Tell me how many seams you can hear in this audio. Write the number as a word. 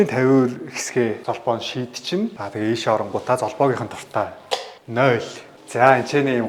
zero